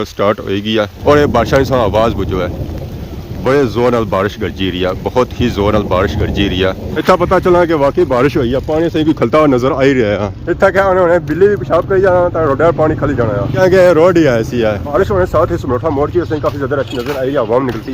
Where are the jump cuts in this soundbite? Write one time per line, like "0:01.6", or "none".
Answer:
0:01.0
0:06.9
0:14.9